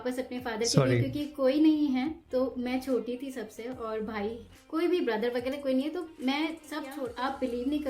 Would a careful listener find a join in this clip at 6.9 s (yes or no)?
yes